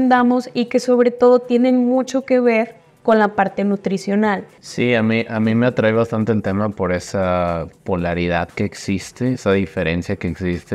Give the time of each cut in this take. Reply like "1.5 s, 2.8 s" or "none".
4.6 s